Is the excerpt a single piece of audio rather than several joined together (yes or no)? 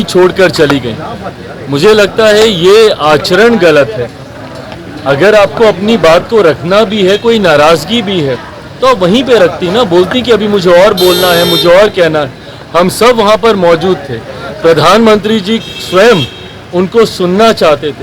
yes